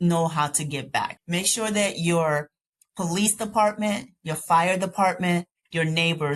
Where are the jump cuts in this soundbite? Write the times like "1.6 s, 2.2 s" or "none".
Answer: 1.2 s